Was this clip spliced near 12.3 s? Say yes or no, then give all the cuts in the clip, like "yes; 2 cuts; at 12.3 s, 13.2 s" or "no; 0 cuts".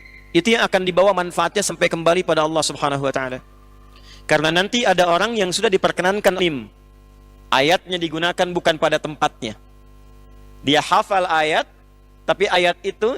no; 1 cut; at 6.4 s